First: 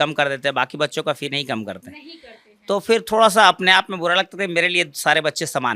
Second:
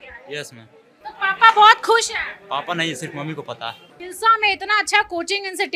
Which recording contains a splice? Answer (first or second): second